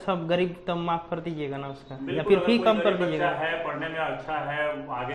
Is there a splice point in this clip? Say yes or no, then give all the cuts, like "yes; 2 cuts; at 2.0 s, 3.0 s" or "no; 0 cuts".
no; 0 cuts